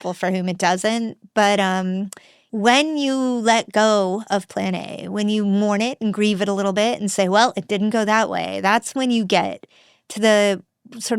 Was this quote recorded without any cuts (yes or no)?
no